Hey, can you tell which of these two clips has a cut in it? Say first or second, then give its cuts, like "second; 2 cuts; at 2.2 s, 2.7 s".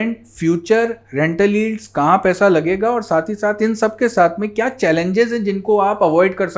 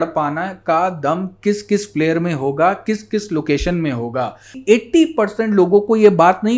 second; 1 cut; at 4.6 s